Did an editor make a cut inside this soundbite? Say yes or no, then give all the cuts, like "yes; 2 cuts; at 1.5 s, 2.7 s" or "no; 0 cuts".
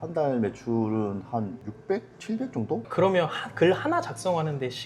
yes; 2 cuts; at 1.7 s, 2.8 s